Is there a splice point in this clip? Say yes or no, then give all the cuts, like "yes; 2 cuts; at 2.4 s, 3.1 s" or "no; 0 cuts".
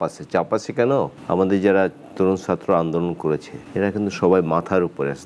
yes; 2 cuts; at 1.2 s, 3.6 s